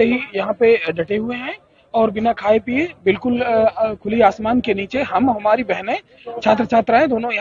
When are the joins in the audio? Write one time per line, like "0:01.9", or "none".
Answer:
none